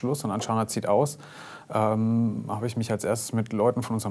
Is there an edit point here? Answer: no; 0 cuts

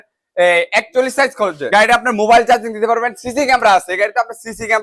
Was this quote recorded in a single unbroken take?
no; 1 cut; at 1.6 s

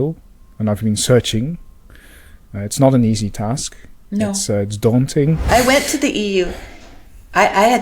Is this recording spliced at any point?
yes; 1 cut; at 5.5 s

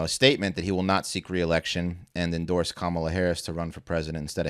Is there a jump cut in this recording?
no; 0 cuts

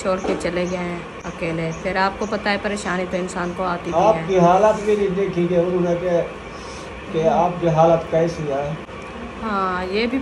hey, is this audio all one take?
no; 1 cut; at 8.9 s

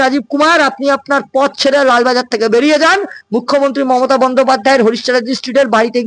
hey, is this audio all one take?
yes; 0 cuts

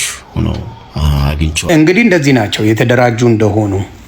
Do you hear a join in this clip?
yes; 1 cut; at 1.7 s

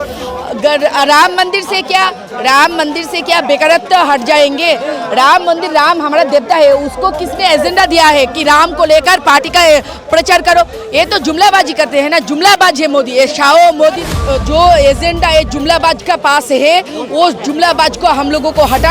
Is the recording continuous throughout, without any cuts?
no; 1 cut; at 14.1 s

